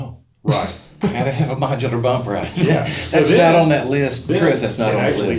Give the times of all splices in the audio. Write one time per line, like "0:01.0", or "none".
0:04.3